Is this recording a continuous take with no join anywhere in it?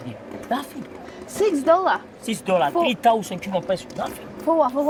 yes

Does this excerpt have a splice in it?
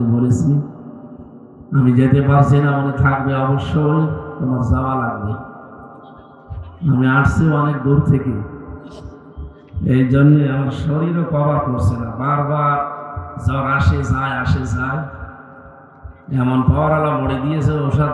no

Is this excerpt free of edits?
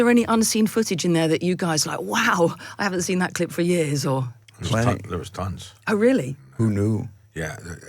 yes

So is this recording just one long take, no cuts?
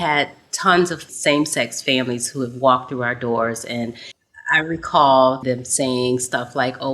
no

